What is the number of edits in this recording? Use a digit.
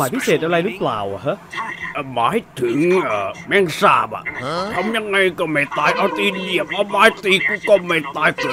0